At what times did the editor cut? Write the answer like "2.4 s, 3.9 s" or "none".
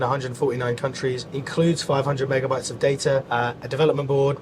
1.3 s, 3.3 s